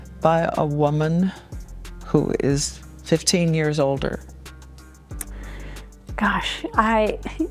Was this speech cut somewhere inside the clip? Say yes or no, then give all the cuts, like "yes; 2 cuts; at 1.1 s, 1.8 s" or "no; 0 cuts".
no; 0 cuts